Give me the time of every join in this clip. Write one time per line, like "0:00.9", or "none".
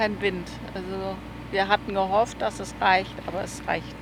none